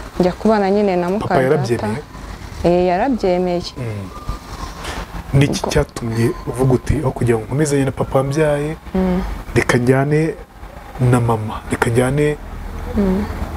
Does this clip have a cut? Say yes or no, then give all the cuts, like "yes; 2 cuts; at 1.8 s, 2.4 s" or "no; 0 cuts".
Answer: no; 0 cuts